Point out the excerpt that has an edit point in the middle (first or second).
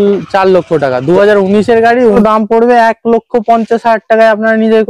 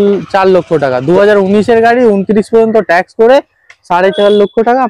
first